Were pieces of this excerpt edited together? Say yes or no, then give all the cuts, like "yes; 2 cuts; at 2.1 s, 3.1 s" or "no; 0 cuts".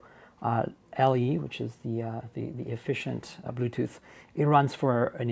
no; 0 cuts